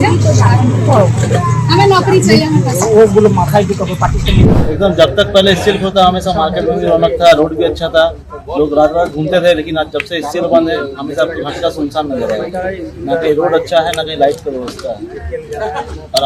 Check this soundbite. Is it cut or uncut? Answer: cut